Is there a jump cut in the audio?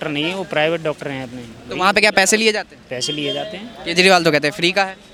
no; 0 cuts

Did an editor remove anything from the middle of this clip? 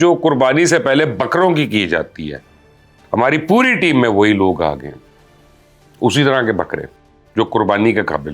no; 0 cuts

